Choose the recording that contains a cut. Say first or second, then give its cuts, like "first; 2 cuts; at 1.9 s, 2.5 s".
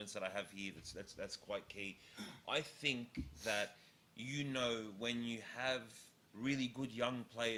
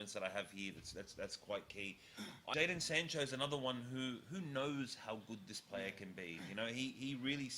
second; 1 cut; at 2.4 s